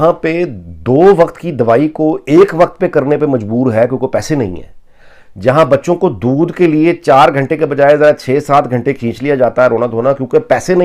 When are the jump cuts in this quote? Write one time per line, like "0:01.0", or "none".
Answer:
none